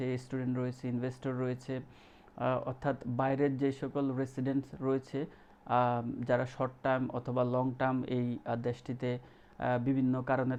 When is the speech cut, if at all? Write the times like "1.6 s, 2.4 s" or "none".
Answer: none